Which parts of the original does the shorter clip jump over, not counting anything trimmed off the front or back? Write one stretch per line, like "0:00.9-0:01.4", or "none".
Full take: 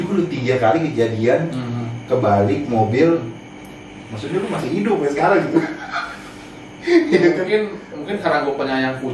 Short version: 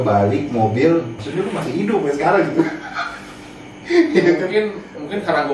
0:03.4-0:04.2